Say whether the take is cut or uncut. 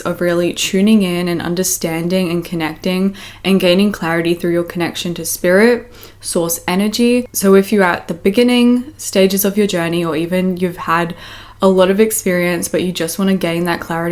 cut